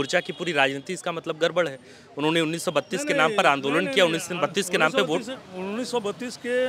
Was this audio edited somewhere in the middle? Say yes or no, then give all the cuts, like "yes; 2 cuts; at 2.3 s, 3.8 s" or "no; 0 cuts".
no; 0 cuts